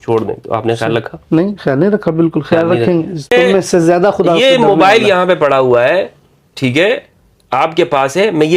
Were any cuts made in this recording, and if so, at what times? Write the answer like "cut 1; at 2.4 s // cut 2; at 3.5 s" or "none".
cut 1; at 3.3 s